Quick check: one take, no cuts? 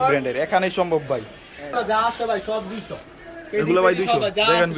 no; 1 cut; at 1.7 s

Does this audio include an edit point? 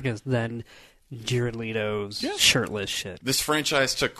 yes; 1 cut; at 3.1 s

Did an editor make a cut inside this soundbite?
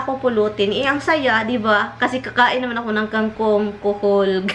no; 0 cuts

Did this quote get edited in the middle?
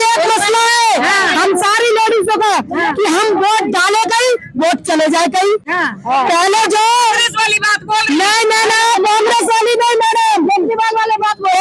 no; 0 cuts

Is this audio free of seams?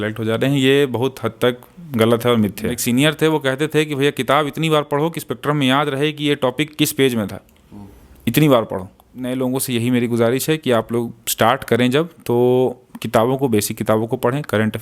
no; 2 cuts; at 2.8 s, 9.3 s

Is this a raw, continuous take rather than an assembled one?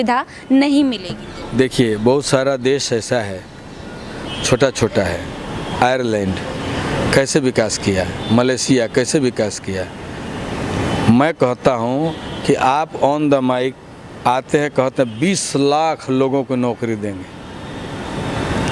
yes; 0 cuts

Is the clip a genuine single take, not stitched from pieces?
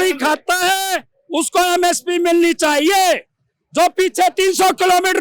yes; 0 cuts

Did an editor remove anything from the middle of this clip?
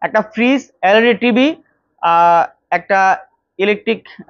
no; 0 cuts

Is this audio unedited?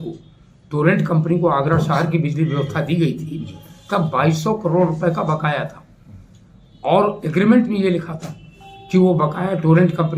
yes; 0 cuts

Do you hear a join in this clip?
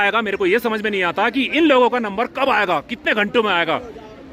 no; 0 cuts

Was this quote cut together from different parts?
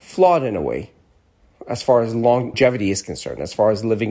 yes; 1 cut; at 2.5 s

